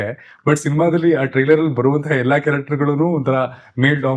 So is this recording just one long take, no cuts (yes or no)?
yes